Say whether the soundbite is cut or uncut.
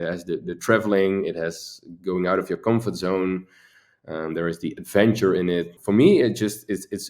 cut